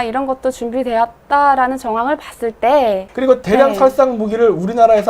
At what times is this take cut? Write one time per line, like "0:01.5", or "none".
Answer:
0:03.1